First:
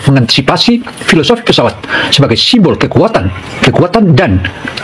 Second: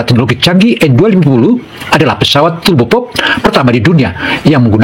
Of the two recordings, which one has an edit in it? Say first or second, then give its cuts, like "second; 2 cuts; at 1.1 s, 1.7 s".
first; 1 cut; at 3.5 s